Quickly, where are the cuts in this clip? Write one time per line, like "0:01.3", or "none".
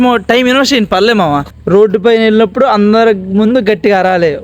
0:01.5